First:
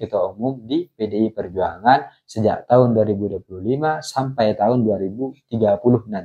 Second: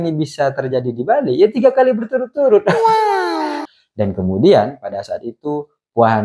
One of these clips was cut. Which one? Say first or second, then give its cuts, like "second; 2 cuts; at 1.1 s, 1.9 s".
second; 1 cut; at 3.6 s